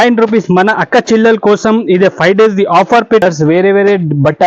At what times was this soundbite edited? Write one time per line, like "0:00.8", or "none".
0:03.2